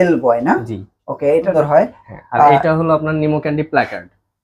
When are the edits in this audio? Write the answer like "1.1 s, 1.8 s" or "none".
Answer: 1.5 s